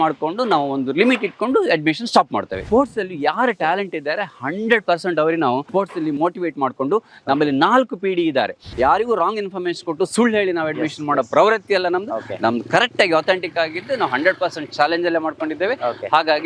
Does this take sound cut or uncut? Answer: cut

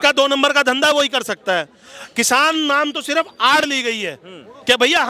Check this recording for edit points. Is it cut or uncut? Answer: uncut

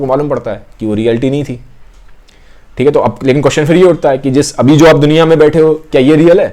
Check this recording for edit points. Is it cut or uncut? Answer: uncut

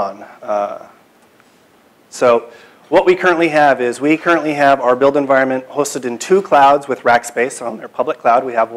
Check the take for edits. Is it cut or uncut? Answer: cut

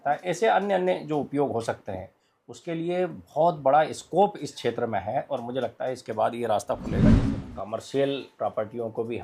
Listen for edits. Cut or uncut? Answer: cut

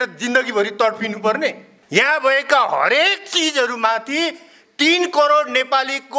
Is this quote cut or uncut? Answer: cut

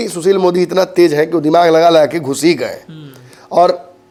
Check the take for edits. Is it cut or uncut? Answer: uncut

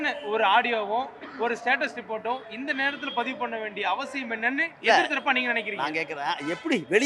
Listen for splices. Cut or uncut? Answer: uncut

